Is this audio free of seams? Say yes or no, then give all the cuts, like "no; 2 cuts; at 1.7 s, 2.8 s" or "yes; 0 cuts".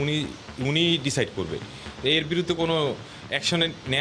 yes; 0 cuts